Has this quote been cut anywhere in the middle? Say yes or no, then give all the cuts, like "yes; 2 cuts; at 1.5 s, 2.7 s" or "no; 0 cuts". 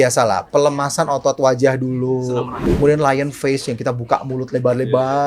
yes; 1 cut; at 2.6 s